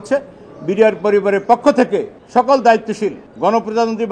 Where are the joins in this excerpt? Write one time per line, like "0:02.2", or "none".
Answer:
0:02.2
0:03.3

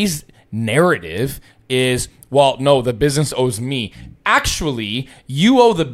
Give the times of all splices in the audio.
none

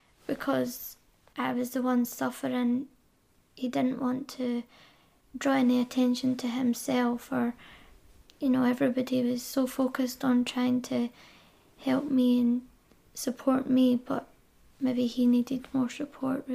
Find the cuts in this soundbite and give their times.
none

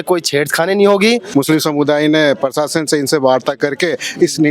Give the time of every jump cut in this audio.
0:01.2

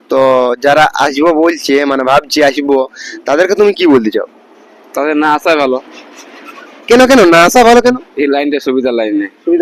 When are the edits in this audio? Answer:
none

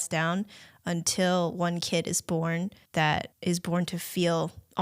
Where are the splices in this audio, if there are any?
0:02.8

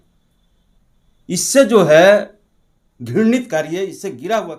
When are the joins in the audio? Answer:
none

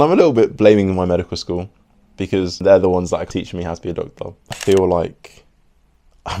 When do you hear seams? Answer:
0:04.6

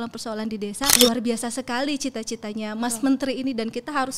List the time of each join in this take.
0:00.9

